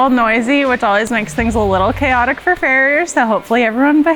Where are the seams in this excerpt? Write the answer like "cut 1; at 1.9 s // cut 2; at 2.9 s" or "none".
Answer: none